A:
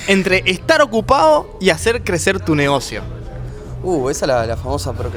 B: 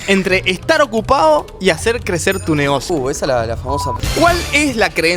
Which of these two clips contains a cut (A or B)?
B